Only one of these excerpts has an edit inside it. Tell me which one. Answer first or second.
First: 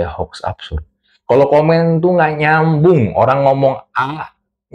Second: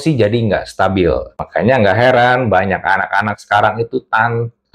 second